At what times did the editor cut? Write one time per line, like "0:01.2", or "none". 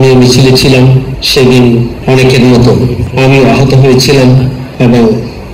0:01.1
0:01.9
0:03.0
0:04.6